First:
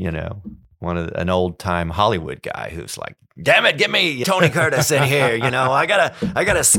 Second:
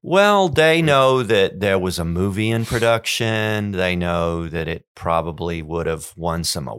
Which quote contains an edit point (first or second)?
first